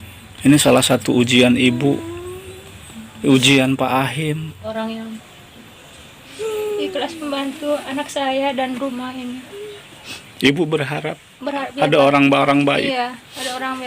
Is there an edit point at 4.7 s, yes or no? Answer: yes